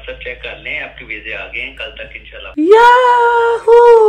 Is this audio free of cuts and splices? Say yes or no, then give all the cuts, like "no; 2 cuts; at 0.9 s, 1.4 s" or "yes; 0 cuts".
no; 1 cut; at 2.5 s